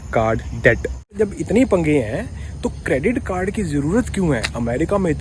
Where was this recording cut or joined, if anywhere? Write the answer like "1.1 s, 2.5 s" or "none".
1.1 s